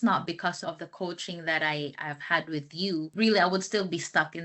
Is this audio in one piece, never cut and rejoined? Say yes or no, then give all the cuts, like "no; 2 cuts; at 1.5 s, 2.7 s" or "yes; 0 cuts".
yes; 0 cuts